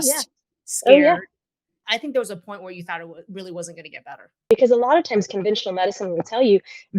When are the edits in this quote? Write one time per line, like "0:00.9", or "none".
0:01.8
0:04.3

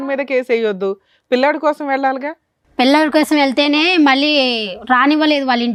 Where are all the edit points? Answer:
none

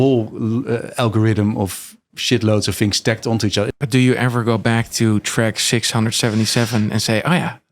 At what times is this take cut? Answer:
0:03.7

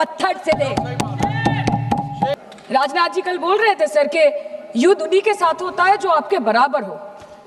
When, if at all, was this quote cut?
0:02.3

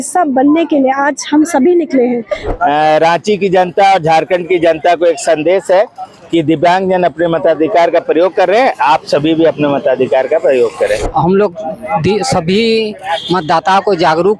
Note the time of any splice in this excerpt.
0:02.4
0:11.1

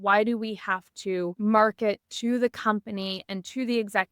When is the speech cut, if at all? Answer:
0:01.3

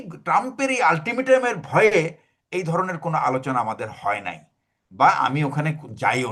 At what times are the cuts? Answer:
none

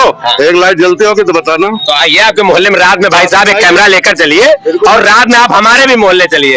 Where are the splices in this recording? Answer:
none

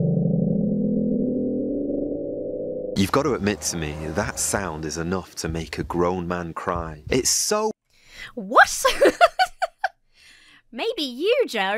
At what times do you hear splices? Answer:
none

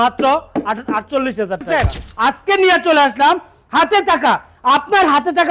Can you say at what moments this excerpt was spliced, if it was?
0:01.6

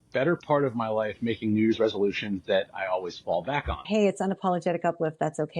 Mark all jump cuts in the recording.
0:03.8

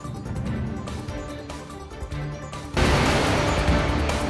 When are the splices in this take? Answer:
none

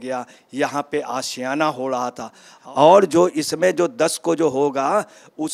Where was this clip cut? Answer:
0:02.6

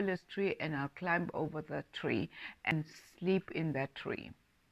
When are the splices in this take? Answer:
0:02.7

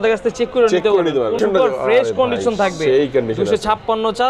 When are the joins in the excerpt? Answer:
0:01.4

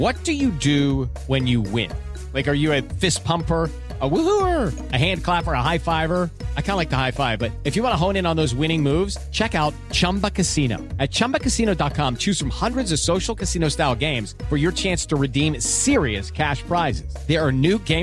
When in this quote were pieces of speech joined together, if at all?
none

